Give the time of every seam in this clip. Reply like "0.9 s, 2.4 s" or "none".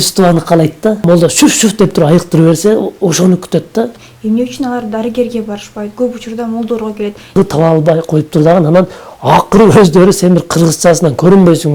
1.0 s, 4.1 s, 7.4 s